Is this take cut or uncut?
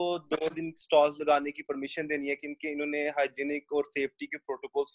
uncut